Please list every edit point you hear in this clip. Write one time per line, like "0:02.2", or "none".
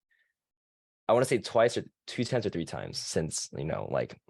none